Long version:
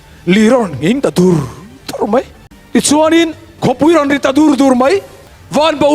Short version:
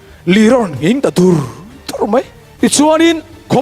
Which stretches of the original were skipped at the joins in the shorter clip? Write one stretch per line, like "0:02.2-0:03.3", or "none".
0:02.4-0:02.5